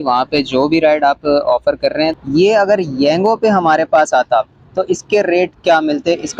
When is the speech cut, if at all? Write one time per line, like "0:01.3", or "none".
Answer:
0:02.2